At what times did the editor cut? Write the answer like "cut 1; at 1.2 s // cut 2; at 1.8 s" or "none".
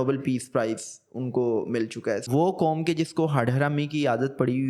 cut 1; at 2.3 s

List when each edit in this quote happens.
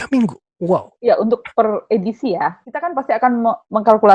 cut 1; at 2.7 s

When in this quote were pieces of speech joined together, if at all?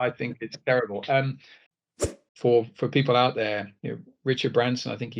cut 1; at 2.0 s

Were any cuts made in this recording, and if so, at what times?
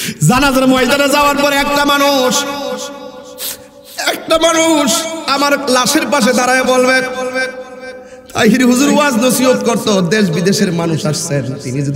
none

